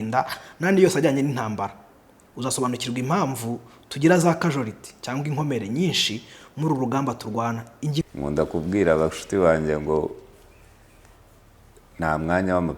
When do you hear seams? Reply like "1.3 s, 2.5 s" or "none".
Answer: 8.0 s

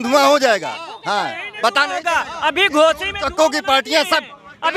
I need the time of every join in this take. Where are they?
none

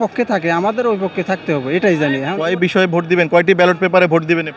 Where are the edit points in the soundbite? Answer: 2.4 s

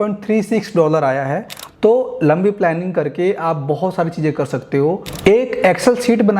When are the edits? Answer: 1.6 s

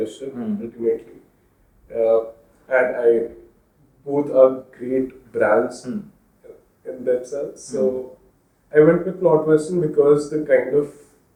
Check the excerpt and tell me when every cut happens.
none

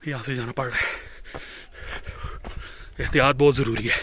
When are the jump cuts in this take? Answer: none

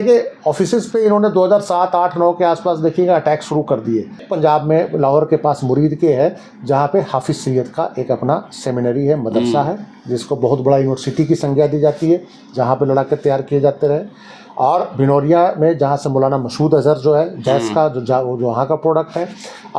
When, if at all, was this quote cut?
4.3 s

